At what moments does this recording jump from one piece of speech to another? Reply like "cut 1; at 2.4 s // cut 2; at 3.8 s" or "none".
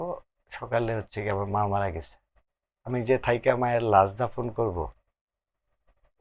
none